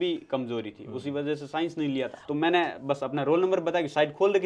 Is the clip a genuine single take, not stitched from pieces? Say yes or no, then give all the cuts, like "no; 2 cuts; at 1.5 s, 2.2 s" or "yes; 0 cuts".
no; 1 cut; at 2.2 s